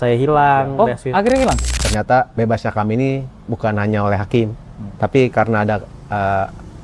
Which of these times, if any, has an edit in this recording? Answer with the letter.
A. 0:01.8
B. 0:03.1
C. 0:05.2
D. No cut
A